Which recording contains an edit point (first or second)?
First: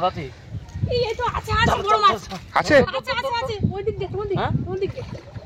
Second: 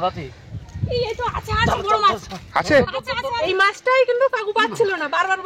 second